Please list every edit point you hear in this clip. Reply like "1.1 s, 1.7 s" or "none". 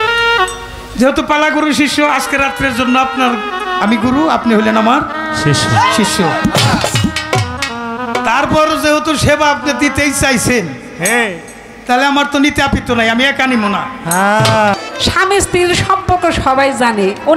14.8 s